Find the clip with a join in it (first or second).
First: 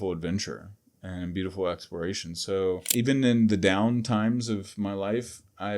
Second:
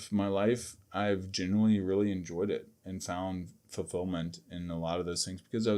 first